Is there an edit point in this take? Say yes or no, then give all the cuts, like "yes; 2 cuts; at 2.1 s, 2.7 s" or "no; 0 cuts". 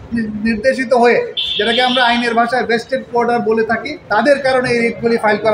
yes; 1 cut; at 3.9 s